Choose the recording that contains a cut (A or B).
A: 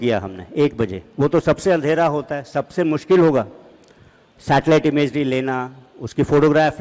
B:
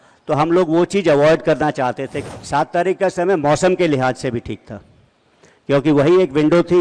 B